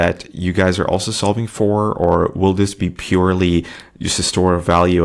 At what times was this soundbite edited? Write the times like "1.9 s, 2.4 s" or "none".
none